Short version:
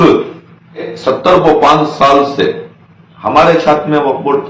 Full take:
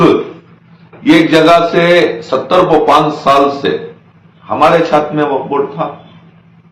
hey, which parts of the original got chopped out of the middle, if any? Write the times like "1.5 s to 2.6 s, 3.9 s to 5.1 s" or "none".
0.9 s to 2.2 s